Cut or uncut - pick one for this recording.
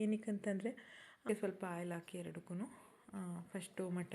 cut